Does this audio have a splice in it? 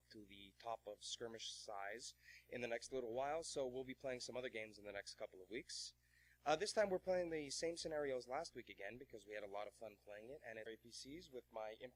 no; 0 cuts

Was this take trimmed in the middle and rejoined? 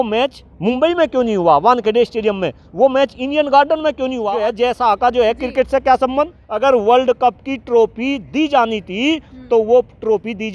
yes; 2 cuts; at 4.2 s, 6.4 s

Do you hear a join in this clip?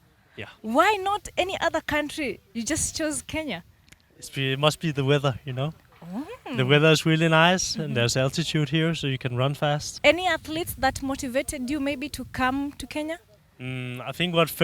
yes; 1 cut; at 9.9 s

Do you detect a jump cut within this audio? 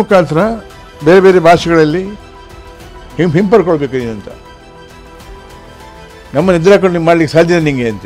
no; 0 cuts

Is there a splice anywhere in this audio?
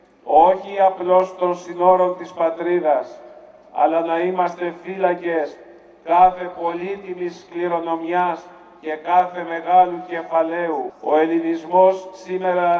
yes; 1 cut; at 10.9 s

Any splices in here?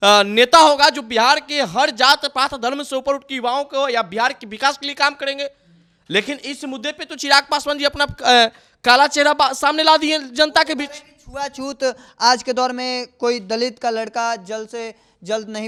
no; 0 cuts

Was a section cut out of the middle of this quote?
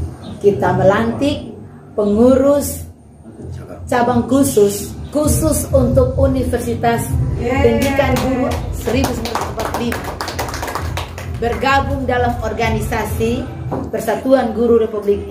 no; 0 cuts

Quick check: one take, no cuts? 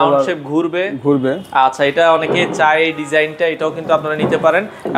yes; 0 cuts

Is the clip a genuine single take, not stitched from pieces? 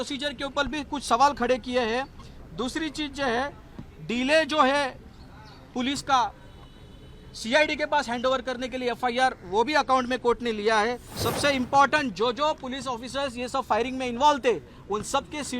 no; 1 cut; at 11.1 s

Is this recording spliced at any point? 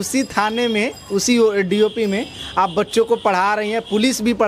no; 0 cuts

